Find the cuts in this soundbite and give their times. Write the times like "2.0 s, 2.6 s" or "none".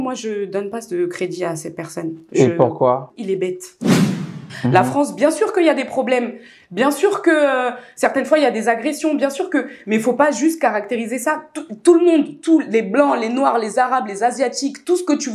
4.1 s

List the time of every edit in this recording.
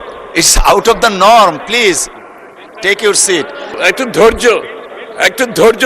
3.8 s

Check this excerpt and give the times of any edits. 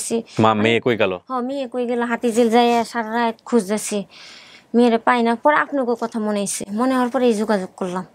none

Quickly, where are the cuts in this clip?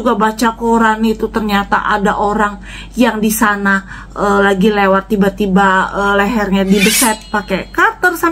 none

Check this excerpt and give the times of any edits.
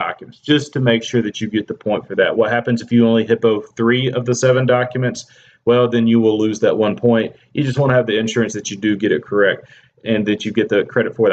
1.7 s

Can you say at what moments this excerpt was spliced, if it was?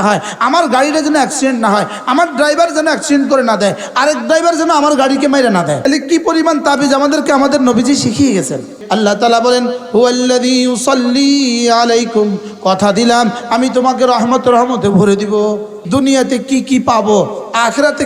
5.8 s, 8.8 s, 15.8 s

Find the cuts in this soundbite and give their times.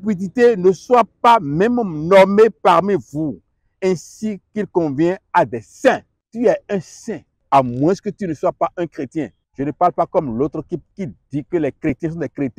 6.2 s, 7.3 s, 9.4 s, 10.9 s

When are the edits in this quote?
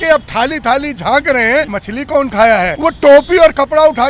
1.8 s, 2.7 s

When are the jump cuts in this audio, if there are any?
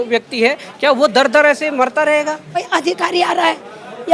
2.7 s

